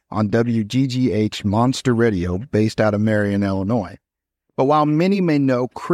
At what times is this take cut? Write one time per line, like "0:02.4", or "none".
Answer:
none